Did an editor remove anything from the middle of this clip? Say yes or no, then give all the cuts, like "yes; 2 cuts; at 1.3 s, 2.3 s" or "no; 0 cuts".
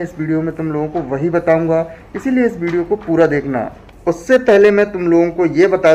no; 0 cuts